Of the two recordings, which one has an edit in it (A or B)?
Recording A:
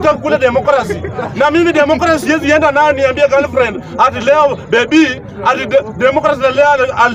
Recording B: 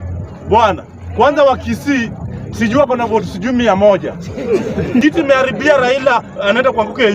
B